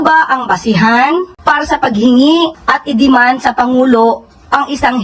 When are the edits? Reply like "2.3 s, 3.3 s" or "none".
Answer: none

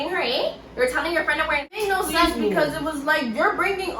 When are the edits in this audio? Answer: 1.8 s

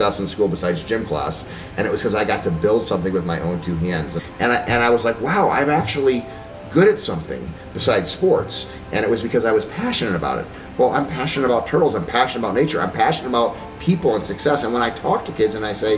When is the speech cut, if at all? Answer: 4.2 s

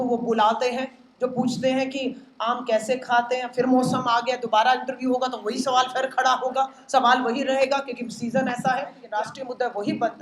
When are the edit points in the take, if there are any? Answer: 9.0 s

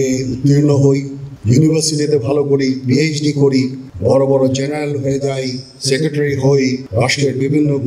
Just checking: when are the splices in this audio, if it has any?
6.8 s

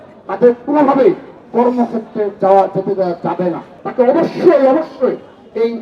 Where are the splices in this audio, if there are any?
3.8 s

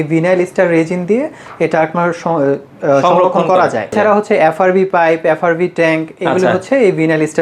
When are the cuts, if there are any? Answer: 3.9 s

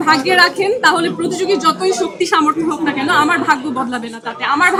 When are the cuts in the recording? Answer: none

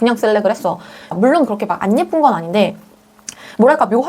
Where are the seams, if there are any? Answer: 1.1 s

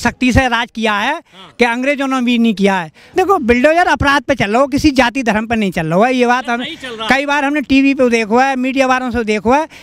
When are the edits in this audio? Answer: 2.9 s

